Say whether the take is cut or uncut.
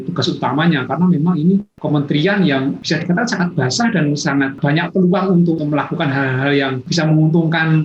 cut